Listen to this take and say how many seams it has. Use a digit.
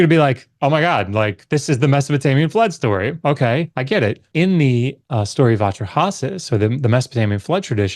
2